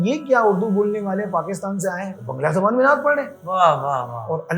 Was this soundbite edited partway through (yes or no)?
yes